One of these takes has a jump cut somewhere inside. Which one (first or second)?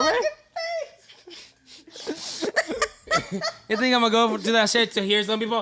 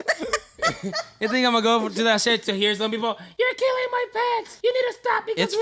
second